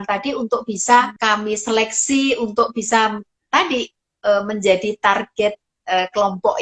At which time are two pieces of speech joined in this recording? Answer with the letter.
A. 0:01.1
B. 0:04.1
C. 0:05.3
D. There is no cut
A